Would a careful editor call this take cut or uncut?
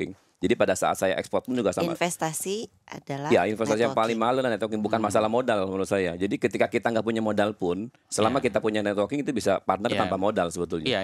uncut